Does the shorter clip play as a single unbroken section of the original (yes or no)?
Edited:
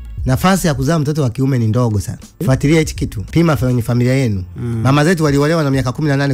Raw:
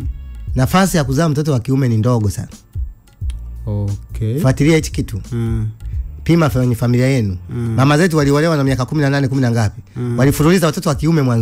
no